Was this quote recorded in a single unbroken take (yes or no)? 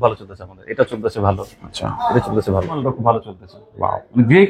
no